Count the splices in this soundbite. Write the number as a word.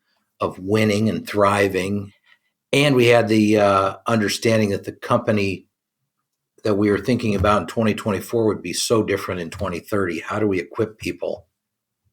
one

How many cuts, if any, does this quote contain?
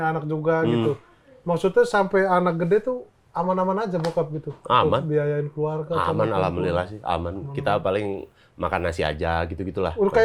zero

